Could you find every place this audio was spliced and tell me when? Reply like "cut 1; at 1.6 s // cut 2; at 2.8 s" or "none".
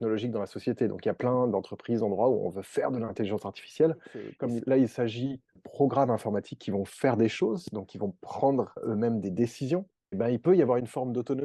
cut 1; at 4.2 s // cut 2; at 5.6 s // cut 3; at 8.8 s // cut 4; at 10.2 s